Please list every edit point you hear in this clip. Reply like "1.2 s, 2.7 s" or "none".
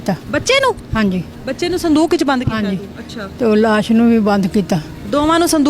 none